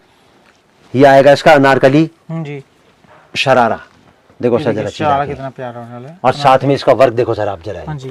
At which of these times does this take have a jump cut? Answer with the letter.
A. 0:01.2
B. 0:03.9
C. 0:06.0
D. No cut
D